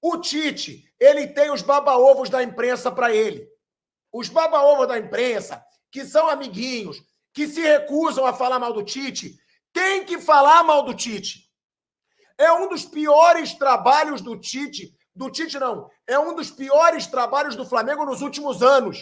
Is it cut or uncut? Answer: uncut